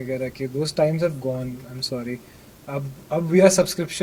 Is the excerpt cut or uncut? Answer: uncut